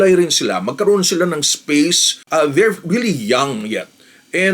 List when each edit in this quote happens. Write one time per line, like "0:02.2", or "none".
0:02.1